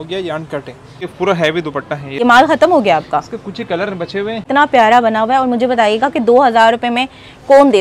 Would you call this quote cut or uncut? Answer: cut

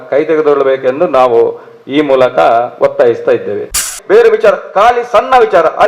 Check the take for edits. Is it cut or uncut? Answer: cut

